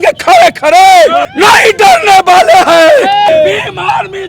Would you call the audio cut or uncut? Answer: cut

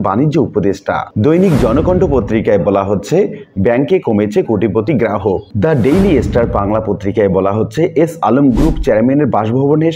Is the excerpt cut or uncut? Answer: cut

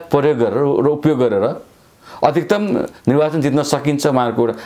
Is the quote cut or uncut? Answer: uncut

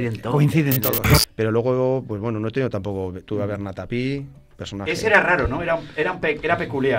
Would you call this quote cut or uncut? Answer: cut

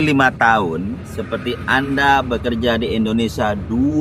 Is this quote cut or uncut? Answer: uncut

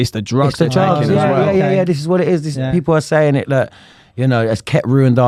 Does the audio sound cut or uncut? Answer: uncut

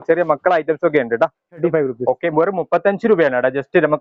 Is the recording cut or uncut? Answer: cut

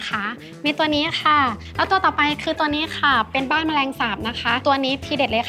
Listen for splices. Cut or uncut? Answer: cut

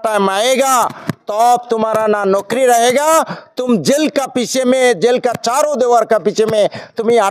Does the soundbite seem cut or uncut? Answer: uncut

